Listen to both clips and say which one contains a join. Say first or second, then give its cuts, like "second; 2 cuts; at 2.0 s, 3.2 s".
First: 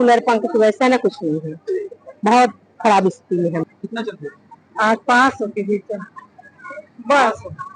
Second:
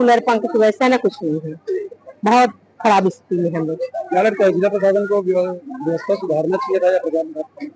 first; 1 cut; at 3.7 s